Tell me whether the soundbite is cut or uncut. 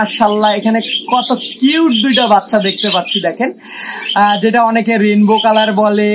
uncut